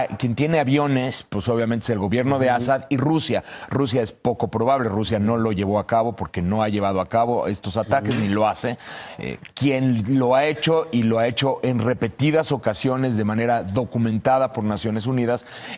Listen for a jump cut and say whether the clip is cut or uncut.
cut